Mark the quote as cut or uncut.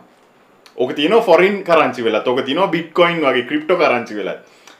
uncut